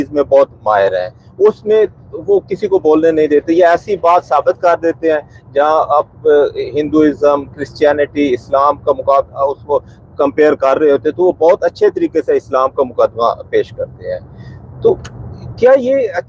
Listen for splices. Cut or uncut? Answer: uncut